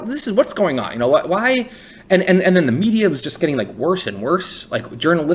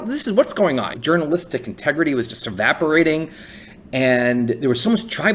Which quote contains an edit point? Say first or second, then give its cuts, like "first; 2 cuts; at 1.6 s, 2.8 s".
second; 2 cuts; at 0.9 s, 2.4 s